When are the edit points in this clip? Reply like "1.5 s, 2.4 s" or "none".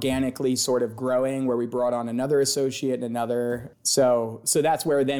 3.7 s